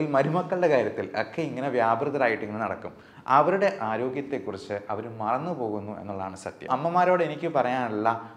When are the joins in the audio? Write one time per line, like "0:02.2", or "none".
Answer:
0:06.7